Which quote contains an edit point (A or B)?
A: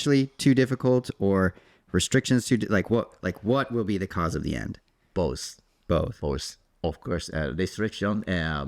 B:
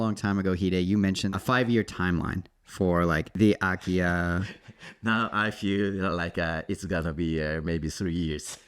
B